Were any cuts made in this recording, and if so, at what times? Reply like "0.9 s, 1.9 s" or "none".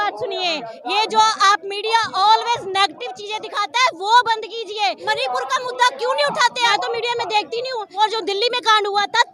5.0 s, 6.7 s, 7.9 s